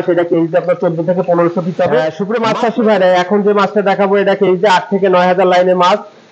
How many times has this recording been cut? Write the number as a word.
one